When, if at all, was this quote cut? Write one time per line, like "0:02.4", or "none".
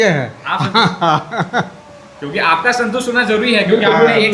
none